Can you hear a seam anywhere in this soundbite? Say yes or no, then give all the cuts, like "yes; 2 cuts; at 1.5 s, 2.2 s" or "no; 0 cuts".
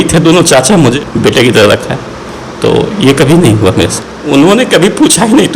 yes; 2 cuts; at 1.0 s, 4.0 s